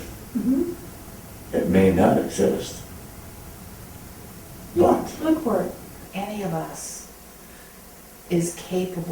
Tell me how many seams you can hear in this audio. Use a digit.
1